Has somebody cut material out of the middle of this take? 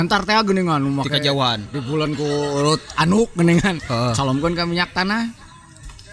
no; 0 cuts

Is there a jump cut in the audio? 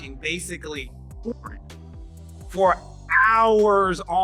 no; 0 cuts

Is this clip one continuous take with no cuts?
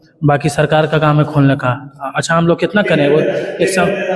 yes; 0 cuts

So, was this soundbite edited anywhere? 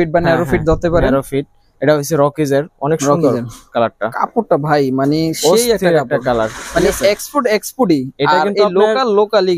no; 0 cuts

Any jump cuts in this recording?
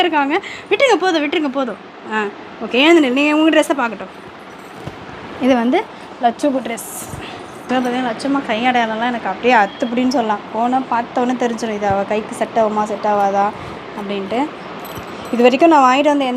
yes; 1 cut; at 7.6 s

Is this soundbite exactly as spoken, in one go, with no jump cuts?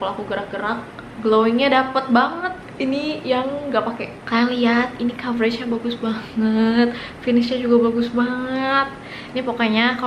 no; 2 cuts; at 1.0 s, 4.1 s

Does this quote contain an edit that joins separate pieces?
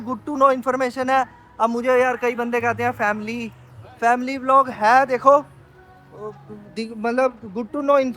no; 0 cuts

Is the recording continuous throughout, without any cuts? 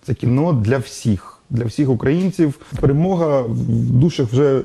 no; 1 cut; at 2.7 s

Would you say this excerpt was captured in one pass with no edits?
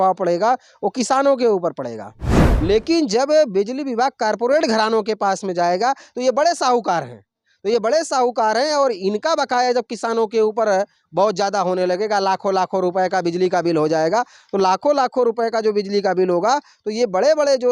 no; 1 cut; at 2.5 s

